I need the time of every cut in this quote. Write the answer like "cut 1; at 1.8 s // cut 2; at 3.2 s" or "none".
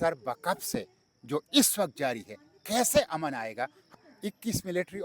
cut 1; at 3.8 s